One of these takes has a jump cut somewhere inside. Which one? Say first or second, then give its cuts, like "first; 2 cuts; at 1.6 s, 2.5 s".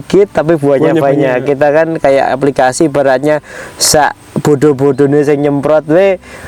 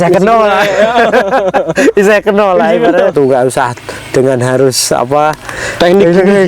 second; 1 cut; at 3.1 s